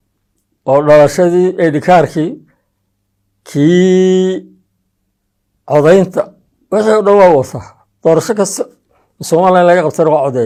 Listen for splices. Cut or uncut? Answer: uncut